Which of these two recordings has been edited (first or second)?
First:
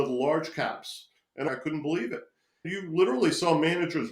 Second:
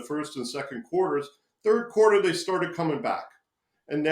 first